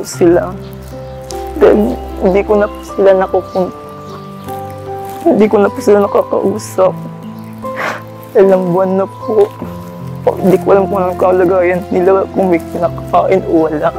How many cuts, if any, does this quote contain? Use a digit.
2